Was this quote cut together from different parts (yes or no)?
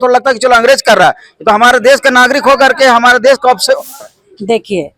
yes